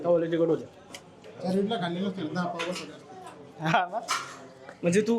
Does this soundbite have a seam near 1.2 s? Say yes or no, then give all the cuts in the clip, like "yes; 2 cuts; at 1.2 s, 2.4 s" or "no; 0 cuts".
yes; 1 cut; at 1.2 s